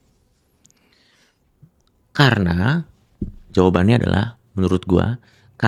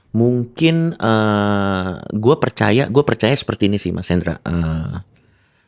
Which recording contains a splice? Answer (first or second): second